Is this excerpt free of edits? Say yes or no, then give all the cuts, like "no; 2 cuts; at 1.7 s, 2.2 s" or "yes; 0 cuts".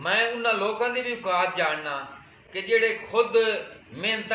yes; 0 cuts